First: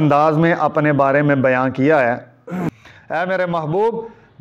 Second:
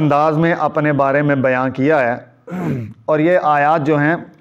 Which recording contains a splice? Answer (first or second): first